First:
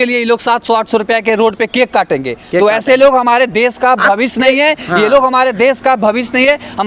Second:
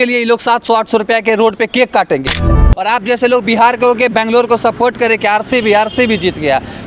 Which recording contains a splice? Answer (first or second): second